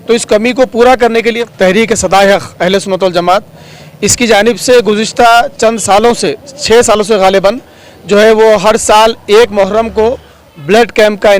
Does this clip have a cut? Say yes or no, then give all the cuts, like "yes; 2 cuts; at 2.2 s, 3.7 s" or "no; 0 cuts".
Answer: yes; 1 cut; at 1.4 s